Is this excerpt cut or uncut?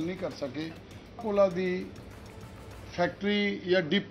cut